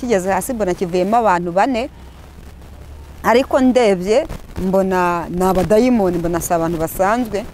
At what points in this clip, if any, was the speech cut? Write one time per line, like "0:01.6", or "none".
none